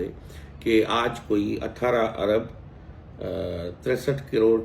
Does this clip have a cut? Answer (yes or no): no